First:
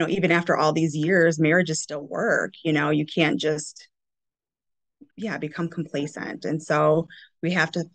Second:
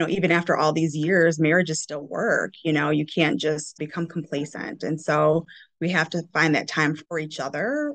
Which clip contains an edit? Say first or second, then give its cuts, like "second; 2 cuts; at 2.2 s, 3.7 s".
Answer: second; 2 cuts; at 3.8 s, 7.0 s